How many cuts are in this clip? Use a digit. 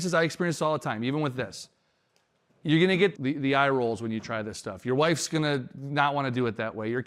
1